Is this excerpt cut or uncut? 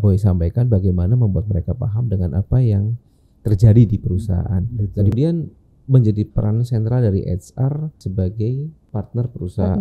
cut